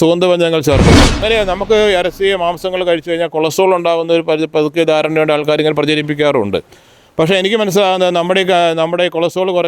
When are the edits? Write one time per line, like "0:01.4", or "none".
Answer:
0:01.2